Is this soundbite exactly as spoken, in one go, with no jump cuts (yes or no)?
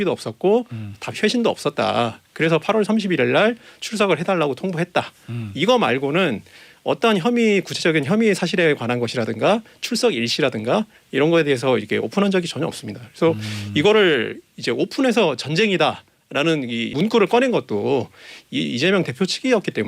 no